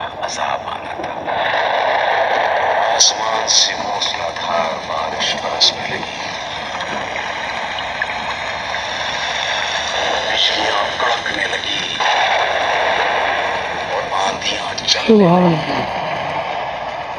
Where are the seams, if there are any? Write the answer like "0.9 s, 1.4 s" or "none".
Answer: none